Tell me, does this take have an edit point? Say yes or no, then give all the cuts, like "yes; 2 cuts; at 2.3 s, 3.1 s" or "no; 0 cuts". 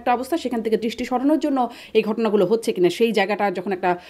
no; 0 cuts